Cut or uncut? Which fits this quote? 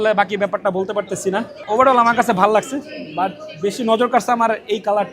cut